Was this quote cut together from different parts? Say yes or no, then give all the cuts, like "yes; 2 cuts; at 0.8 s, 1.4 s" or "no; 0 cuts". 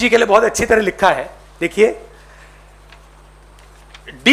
no; 0 cuts